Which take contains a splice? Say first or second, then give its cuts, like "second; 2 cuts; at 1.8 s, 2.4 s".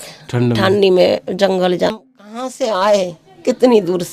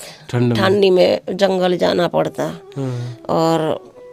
first; 1 cut; at 1.9 s